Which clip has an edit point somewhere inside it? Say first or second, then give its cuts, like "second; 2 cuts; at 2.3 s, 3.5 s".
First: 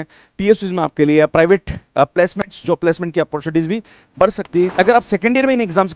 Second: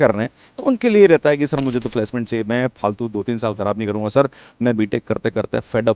first; 1 cut; at 4.7 s